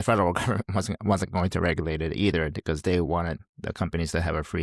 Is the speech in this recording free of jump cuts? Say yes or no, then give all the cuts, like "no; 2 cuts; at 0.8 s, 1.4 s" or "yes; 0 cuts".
no; 1 cut; at 3.4 s